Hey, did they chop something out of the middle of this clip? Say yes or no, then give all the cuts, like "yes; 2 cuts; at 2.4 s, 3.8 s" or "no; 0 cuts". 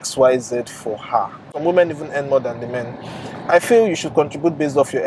yes; 1 cut; at 1.5 s